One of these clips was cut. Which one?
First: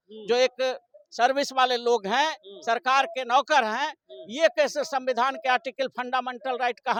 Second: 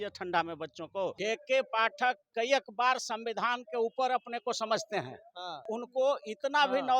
second; 2 cuts; at 1.2 s, 5.7 s

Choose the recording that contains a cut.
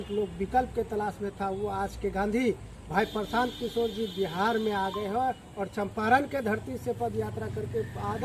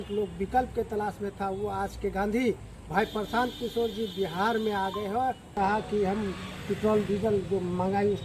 second; 1 cut; at 5.5 s

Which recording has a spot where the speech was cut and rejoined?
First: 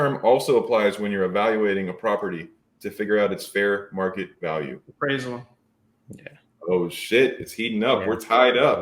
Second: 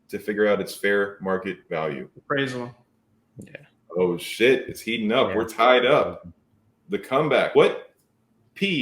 second; 1 cut; at 7.5 s

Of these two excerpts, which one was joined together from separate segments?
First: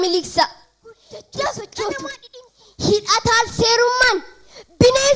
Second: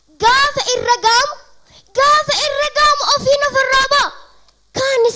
first; 1 cut; at 2.2 s

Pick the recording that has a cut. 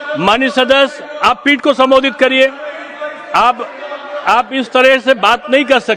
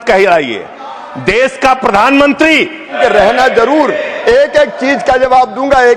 second; 1 cut; at 3.0 s

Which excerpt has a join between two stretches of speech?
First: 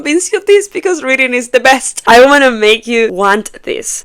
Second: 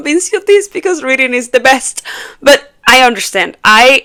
first; 1 cut; at 1.9 s

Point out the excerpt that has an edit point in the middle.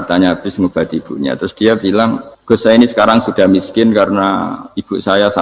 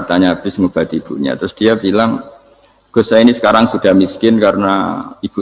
first; 1 cut; at 2.3 s

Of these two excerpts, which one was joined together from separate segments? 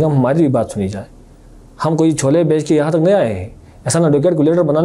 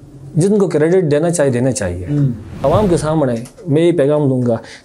second; 1 cut; at 2.6 s

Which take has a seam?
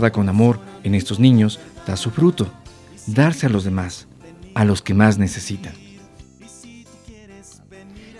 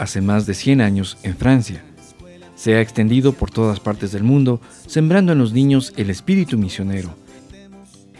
first; 1 cut; at 7.1 s

